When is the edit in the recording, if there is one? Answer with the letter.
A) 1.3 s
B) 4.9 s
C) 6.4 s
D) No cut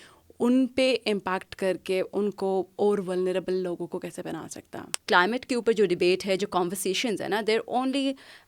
B